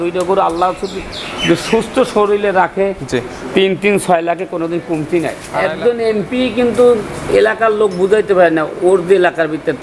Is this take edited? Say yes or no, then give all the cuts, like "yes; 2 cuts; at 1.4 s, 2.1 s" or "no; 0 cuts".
yes; 1 cut; at 5.4 s